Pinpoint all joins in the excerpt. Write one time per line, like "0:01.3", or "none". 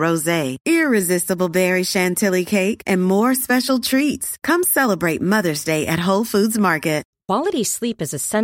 0:07.1